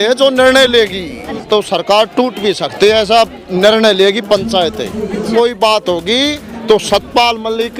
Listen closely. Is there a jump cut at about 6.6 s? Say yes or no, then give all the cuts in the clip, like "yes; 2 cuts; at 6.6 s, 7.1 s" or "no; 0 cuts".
no; 2 cuts; at 1.4 s, 5.3 s